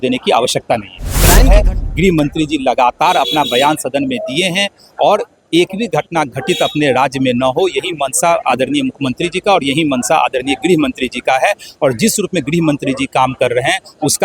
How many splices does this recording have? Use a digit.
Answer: 1